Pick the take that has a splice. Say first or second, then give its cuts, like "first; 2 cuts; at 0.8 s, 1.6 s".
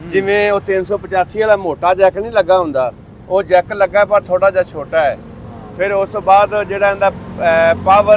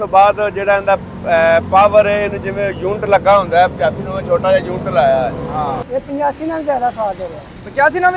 second; 1 cut; at 5.8 s